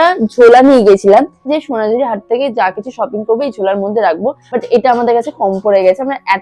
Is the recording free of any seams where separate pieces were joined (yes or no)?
no